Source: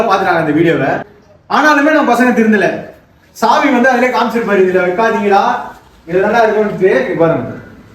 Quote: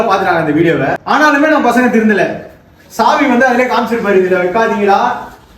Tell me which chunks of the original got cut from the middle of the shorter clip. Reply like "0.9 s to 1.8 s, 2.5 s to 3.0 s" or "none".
1.0 s to 1.4 s